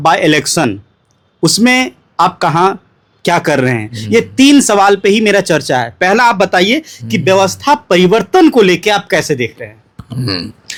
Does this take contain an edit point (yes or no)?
no